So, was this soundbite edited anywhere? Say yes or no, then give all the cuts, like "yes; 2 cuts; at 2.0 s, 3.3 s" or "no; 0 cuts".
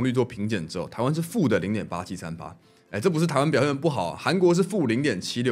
no; 0 cuts